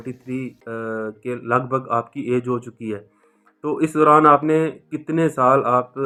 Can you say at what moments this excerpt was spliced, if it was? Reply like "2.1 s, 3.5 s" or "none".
none